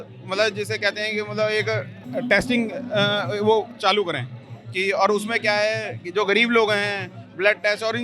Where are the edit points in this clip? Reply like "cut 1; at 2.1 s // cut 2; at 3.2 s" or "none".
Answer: cut 1; at 2.0 s